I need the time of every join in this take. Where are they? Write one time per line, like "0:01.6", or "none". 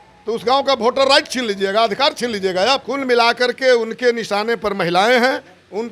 0:02.9